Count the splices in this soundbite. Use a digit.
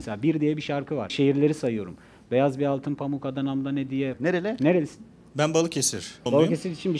3